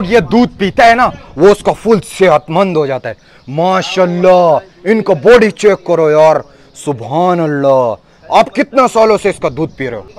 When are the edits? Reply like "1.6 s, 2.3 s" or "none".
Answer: none